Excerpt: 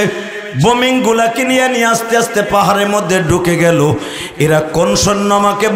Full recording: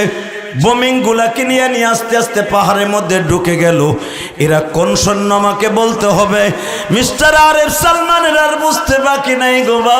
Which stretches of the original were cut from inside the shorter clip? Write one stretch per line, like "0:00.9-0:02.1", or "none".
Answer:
none